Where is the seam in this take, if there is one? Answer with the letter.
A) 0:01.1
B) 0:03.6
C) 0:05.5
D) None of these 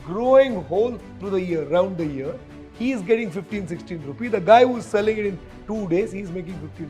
A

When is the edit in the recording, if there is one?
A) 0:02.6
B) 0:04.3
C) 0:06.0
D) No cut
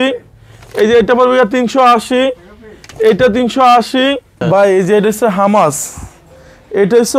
B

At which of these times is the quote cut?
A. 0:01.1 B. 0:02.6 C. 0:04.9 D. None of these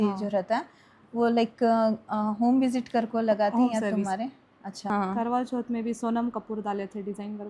C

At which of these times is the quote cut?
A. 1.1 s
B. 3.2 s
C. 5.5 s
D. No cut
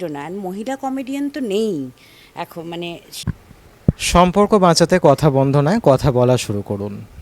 B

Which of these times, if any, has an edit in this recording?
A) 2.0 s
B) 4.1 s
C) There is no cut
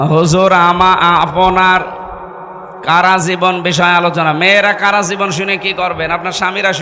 C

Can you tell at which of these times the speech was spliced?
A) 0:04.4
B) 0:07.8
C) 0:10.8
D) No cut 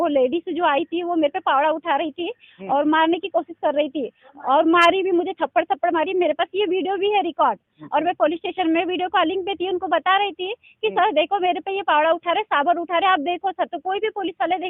D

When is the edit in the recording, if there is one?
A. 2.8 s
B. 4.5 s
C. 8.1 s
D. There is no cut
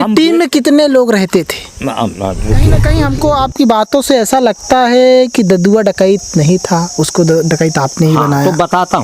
A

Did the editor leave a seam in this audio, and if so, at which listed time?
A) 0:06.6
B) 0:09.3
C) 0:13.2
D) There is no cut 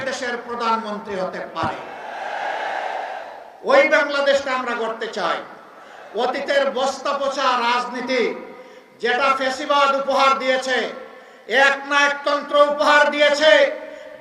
D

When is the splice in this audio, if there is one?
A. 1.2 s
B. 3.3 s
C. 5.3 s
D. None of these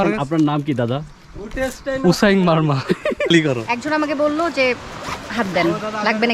B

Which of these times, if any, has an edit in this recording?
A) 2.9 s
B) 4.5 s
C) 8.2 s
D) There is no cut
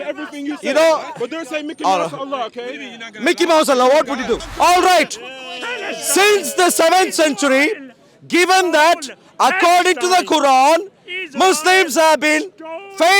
B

